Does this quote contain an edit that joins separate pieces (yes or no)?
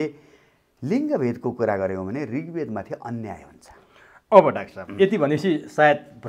no